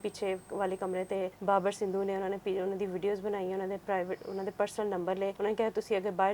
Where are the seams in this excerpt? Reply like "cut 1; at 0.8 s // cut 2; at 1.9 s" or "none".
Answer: cut 1; at 1.4 s // cut 2; at 5.3 s